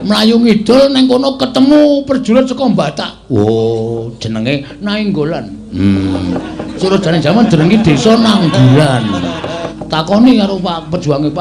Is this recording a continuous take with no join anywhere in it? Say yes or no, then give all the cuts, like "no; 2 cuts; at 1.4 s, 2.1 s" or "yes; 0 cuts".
no; 1 cut; at 9.7 s